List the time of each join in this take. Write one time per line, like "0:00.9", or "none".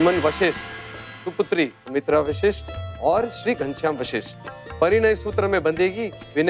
none